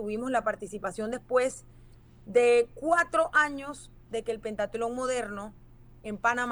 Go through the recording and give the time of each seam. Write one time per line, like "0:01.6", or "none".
none